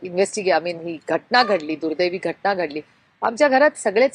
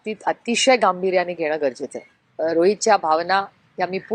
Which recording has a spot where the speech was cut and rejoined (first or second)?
second